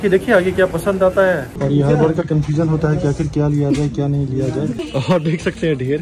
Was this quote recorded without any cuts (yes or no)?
no